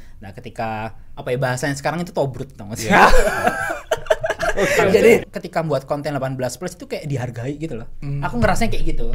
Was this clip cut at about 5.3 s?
yes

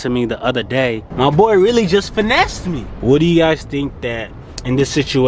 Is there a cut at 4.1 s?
no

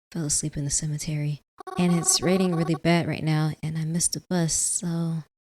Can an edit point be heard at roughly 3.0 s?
no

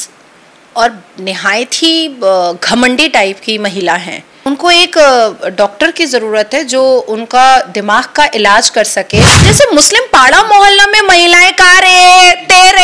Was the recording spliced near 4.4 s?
yes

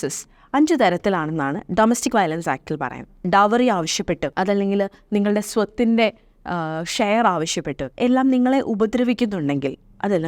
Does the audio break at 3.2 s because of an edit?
yes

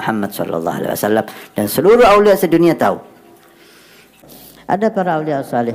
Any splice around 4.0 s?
yes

